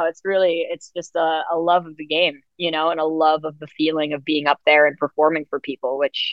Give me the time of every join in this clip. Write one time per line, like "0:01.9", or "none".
none